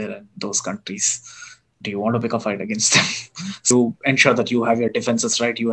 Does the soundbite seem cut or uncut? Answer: cut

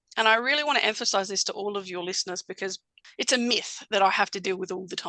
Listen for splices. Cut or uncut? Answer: cut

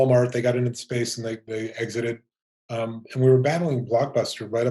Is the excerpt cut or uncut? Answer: uncut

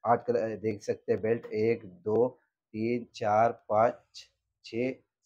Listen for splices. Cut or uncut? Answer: uncut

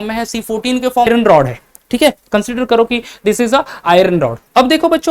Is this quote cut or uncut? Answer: cut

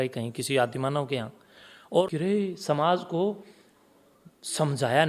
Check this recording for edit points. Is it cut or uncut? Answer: cut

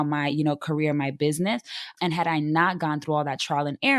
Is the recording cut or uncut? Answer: uncut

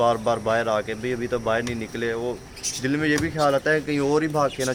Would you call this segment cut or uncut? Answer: uncut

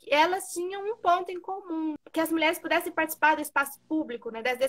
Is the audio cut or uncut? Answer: cut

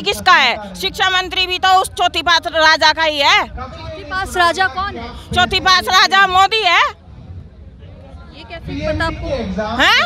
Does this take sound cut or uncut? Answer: uncut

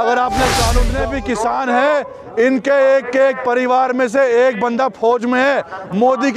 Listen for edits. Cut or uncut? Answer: cut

